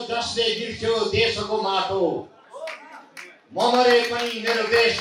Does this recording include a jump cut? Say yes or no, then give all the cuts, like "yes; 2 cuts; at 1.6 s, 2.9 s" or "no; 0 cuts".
no; 0 cuts